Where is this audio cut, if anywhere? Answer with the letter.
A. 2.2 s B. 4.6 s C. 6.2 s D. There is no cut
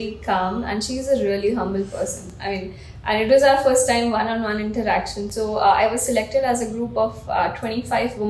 D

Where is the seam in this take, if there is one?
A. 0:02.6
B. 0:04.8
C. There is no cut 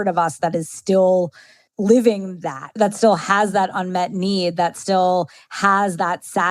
A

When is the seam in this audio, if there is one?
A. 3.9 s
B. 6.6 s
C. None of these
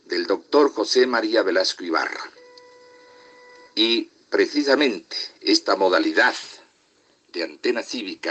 C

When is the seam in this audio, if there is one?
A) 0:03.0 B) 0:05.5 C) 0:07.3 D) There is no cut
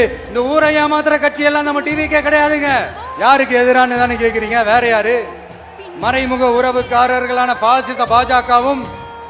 A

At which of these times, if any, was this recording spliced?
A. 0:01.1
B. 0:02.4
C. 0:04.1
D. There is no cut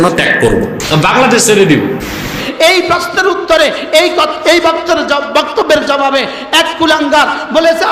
B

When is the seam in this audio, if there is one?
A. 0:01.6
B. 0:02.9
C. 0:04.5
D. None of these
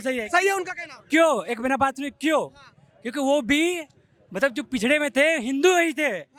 D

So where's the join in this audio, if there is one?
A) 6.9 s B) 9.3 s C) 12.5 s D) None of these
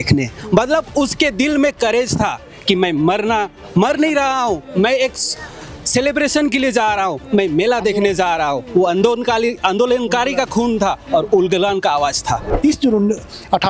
C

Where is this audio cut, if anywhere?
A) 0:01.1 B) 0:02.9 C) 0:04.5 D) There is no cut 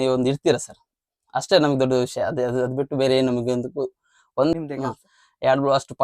C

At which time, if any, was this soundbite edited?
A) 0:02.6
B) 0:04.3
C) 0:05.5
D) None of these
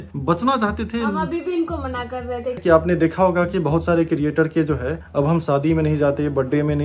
A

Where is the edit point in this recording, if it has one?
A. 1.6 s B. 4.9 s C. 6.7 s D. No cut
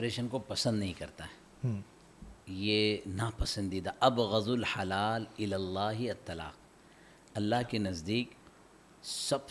D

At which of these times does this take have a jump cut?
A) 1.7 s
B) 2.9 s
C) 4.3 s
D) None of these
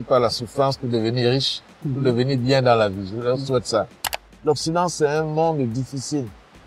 C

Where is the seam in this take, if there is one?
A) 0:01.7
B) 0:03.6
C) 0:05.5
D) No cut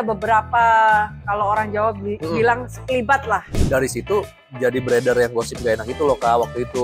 B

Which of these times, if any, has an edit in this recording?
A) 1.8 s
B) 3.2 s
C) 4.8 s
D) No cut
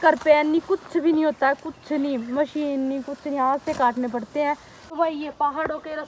C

